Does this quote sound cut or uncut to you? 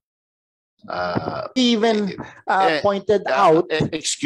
cut